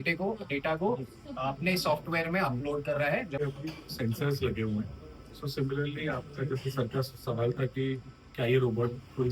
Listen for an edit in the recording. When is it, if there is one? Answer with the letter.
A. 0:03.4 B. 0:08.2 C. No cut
A